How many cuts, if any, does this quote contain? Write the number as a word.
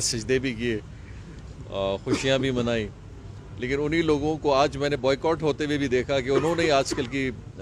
zero